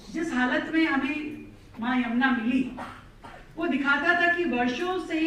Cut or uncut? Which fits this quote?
uncut